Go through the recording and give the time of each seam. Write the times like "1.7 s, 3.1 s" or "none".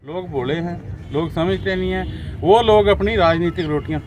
none